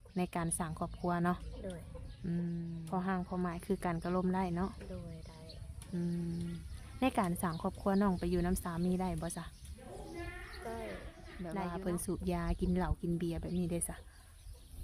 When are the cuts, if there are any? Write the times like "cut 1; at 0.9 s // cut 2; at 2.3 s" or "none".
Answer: cut 1; at 2.8 s // cut 2; at 11.4 s